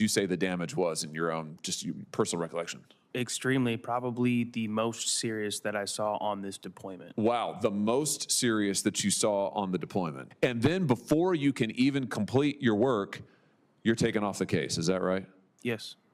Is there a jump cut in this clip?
yes; 1 cut; at 10.2 s

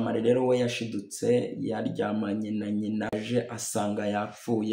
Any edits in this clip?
yes; 1 cut; at 3.1 s

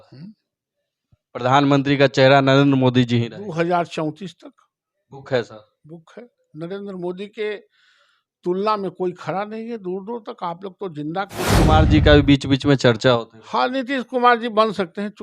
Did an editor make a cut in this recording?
yes; 1 cut; at 11.5 s

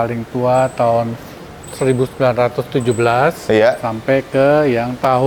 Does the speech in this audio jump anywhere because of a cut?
no; 0 cuts

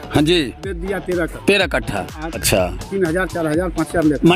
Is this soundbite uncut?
no; 1 cut; at 2.4 s

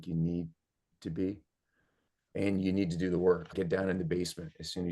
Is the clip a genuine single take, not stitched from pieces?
no; 2 cuts; at 2.3 s, 3.5 s

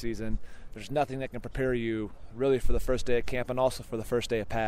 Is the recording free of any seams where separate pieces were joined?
yes; 0 cuts

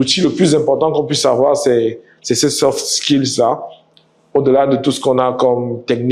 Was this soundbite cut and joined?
no; 0 cuts

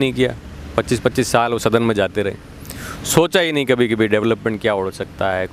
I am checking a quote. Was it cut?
no; 0 cuts

